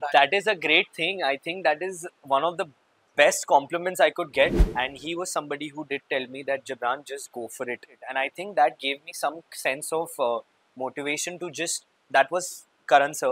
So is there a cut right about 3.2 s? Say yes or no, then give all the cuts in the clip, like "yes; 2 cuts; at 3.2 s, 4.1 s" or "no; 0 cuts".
no; 3 cuts; at 4.6 s, 8.0 s, 12.0 s